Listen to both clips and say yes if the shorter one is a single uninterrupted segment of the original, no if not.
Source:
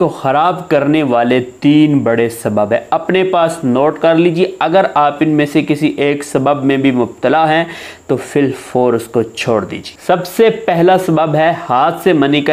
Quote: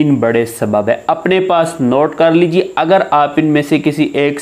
yes